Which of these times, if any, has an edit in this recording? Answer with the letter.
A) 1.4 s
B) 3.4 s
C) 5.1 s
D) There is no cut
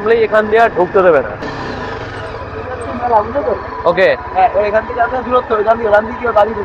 D